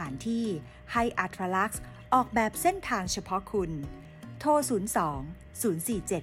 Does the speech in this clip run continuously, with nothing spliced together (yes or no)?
yes